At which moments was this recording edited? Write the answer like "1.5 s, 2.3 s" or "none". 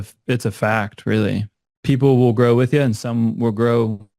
1.5 s